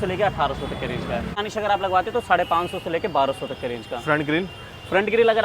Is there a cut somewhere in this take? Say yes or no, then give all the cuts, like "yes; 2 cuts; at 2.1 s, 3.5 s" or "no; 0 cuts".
yes; 1 cut; at 1.4 s